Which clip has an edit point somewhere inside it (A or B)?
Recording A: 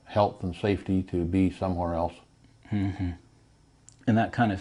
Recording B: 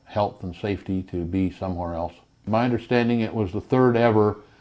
B